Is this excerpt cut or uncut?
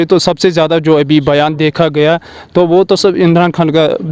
uncut